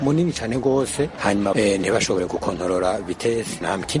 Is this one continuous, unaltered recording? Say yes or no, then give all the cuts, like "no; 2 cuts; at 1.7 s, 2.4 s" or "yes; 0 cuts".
no; 1 cut; at 1.5 s